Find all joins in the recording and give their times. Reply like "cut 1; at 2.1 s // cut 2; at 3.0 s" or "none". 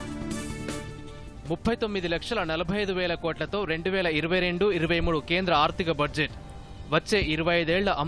cut 1; at 1.2 s